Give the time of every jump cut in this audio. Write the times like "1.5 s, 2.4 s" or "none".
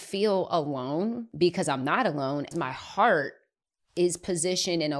1.2 s, 2.5 s

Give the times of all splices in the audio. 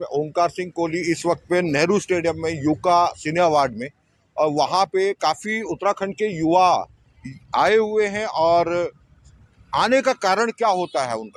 none

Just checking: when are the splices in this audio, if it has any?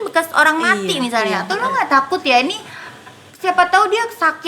none

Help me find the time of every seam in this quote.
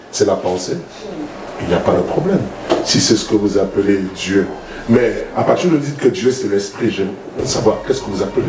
none

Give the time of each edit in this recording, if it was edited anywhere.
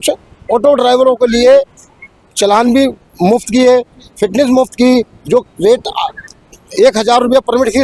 none

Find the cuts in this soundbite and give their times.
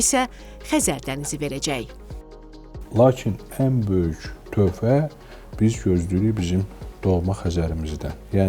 none

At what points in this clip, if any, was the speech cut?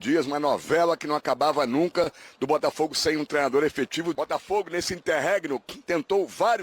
4.2 s

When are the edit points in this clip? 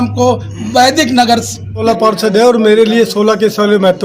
1.8 s

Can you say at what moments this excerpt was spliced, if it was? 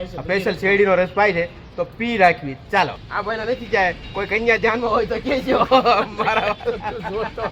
3.1 s

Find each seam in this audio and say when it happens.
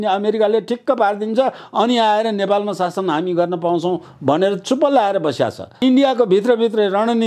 5.8 s

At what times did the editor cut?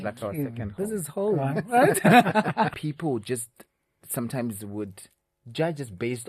2.8 s

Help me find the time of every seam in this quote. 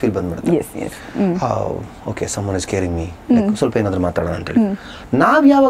none

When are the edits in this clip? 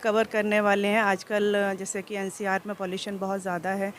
none

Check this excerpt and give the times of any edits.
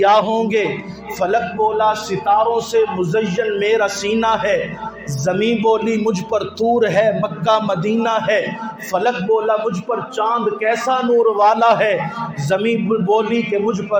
none

